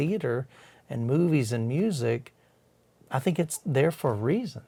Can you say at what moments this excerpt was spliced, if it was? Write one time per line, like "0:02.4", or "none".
none